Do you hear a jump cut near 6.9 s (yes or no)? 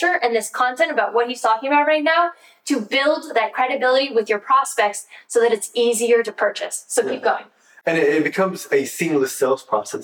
no